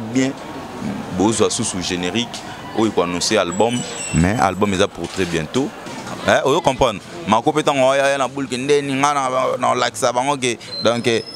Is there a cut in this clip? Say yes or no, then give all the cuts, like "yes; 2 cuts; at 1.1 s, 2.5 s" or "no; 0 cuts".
yes; 1 cut; at 5.9 s